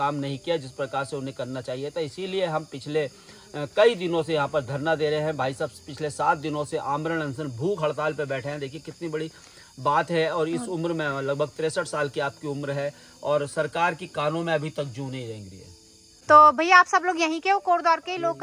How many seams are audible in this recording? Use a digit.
0